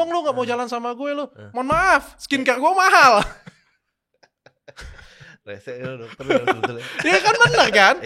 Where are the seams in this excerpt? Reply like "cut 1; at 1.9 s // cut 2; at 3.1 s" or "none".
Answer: none